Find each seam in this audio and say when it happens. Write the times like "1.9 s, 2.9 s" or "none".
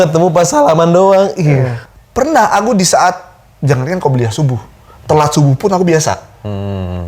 1.7 s

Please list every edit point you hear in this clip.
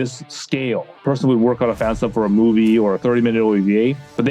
1.0 s

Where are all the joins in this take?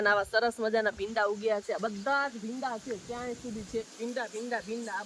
none

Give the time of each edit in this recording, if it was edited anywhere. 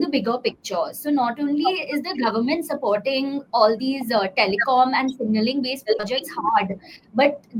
none

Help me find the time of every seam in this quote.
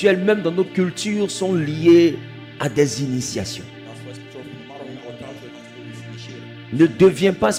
none

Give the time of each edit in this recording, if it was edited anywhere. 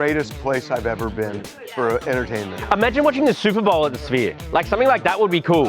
2.6 s

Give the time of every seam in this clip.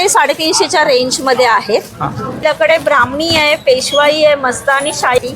2.4 s

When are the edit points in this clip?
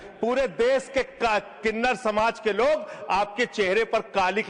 none

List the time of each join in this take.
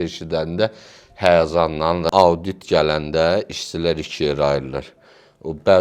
2.1 s

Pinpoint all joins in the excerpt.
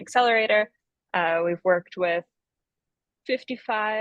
none

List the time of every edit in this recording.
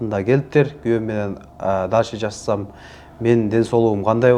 none

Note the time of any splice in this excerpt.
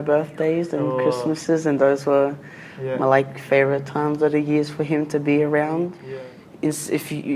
6.0 s

